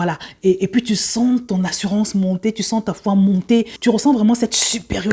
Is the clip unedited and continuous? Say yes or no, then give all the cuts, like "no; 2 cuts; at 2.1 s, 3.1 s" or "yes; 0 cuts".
yes; 0 cuts